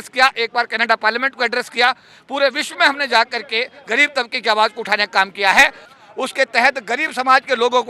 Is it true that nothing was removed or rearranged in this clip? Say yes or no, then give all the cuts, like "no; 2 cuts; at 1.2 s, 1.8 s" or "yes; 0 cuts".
no; 1 cut; at 5.8 s